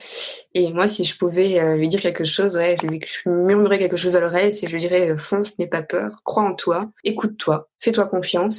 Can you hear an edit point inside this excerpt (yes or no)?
yes